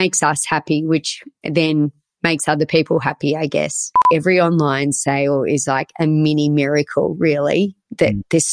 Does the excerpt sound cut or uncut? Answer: cut